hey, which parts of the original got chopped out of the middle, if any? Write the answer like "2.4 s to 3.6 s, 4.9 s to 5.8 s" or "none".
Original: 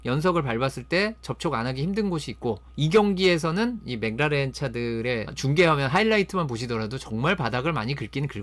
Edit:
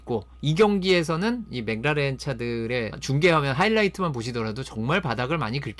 none